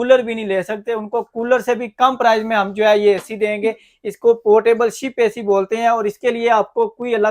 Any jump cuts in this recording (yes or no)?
no